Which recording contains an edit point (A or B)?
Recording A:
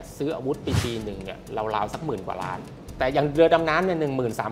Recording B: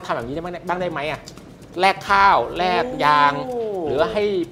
A